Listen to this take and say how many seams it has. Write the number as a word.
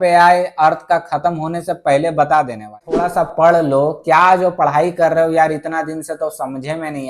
one